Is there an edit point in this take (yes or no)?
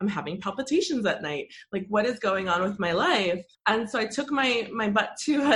yes